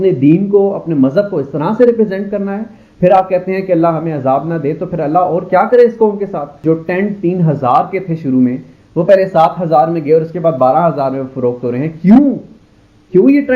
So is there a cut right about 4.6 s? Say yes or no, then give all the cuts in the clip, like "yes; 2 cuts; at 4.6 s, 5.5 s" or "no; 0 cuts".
no; 1 cut; at 6.6 s